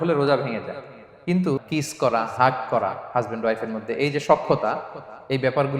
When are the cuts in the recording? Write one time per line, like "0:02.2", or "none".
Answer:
0:01.6